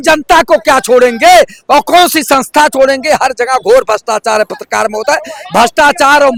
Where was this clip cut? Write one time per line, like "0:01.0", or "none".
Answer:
none